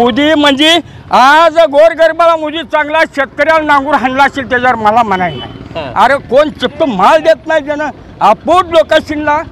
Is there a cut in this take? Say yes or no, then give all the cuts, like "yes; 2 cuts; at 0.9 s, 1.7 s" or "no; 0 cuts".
no; 0 cuts